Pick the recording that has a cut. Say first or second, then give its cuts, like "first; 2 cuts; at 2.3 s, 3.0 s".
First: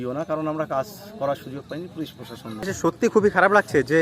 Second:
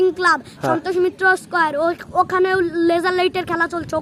first; 1 cut; at 2.7 s